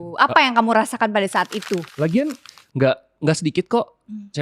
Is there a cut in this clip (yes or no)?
yes